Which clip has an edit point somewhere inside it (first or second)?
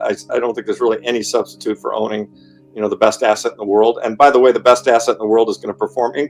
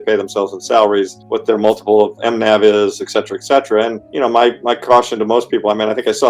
second